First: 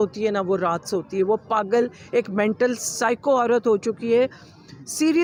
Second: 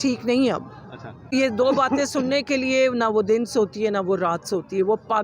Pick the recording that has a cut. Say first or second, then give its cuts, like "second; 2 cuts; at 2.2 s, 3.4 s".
second; 1 cut; at 1.3 s